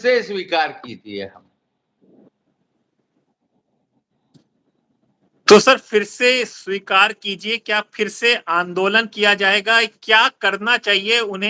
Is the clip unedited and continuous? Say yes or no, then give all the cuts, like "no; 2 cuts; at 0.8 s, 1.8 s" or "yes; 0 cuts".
yes; 0 cuts